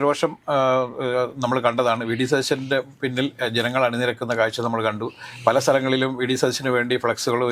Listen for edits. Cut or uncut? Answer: uncut